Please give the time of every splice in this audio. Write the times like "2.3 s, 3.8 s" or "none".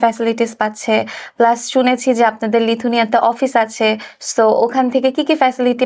none

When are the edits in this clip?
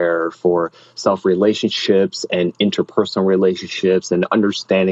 none

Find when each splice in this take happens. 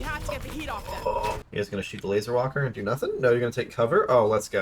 1.4 s

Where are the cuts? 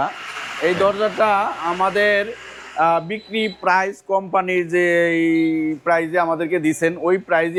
none

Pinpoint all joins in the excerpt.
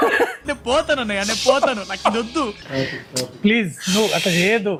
none

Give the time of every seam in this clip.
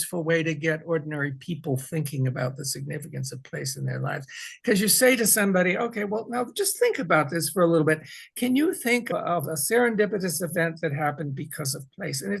none

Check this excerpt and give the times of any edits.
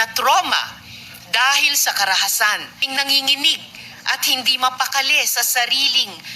2.8 s

